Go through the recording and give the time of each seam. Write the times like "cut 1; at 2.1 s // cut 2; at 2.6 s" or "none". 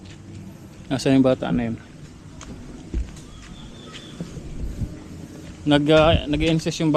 none